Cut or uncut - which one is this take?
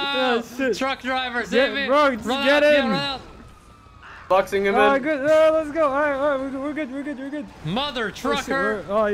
cut